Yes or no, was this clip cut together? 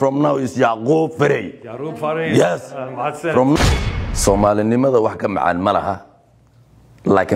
yes